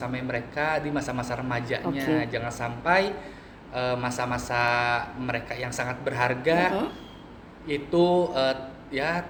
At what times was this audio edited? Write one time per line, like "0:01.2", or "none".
none